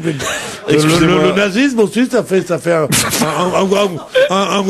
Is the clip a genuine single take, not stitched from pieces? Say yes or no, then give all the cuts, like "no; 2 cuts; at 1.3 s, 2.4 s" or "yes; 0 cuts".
no; 1 cut; at 3.5 s